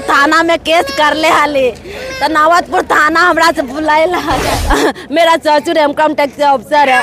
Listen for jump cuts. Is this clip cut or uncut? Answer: cut